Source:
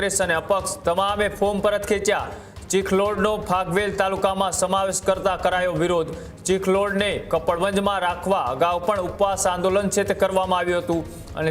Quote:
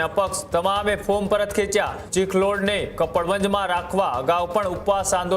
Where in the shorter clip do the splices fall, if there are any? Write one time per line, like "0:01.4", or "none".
0:02.0